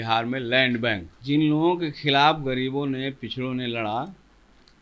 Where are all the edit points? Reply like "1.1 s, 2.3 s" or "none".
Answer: 1.1 s